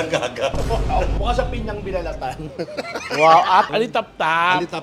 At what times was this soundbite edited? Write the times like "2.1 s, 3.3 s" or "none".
3.7 s